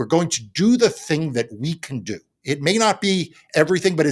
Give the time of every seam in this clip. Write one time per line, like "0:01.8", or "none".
none